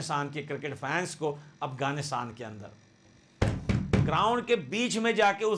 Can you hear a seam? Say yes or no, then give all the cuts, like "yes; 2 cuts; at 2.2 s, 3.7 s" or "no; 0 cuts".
no; 0 cuts